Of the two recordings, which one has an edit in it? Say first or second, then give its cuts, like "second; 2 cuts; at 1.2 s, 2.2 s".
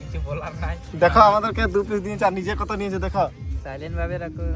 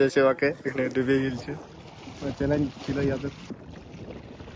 second; 1 cut; at 3.5 s